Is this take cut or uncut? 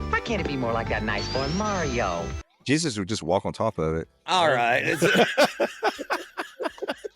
cut